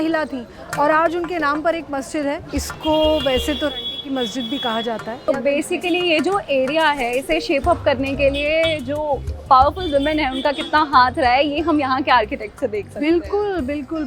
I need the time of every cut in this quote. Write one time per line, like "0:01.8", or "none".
0:02.4
0:05.4